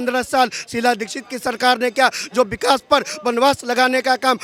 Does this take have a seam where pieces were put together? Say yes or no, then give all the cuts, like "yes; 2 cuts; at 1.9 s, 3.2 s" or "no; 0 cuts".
no; 0 cuts